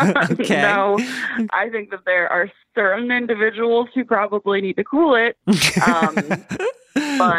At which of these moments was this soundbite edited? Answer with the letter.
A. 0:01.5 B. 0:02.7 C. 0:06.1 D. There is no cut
A